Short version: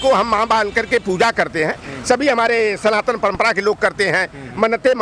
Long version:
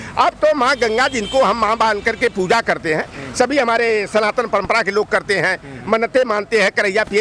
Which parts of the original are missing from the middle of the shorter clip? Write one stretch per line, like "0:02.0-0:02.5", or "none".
none